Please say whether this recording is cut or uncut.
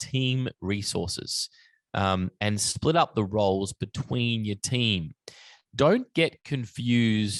uncut